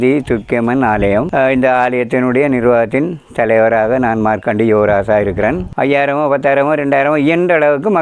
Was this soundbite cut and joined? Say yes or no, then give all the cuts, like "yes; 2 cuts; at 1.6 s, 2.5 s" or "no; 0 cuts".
yes; 1 cut; at 5.7 s